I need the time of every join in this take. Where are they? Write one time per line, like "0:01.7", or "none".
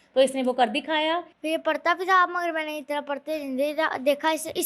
0:01.3